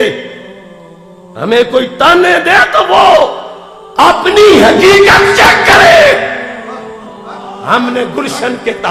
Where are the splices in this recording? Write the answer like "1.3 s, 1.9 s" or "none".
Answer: none